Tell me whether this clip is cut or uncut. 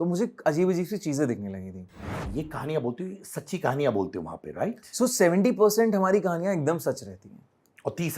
cut